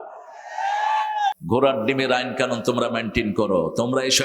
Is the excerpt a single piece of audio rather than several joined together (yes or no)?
no